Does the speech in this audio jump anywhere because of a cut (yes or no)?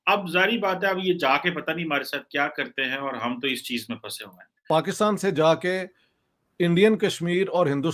yes